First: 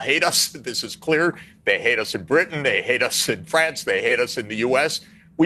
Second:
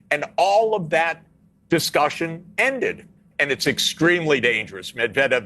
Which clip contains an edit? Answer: second; 1 cut; at 2.9 s

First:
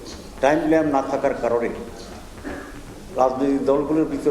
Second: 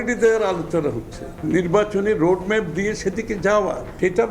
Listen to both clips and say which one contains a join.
second; 1 cut; at 1.3 s

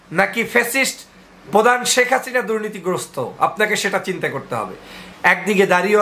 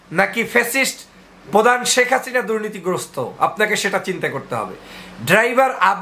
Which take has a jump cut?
first; 1 cut; at 5.0 s

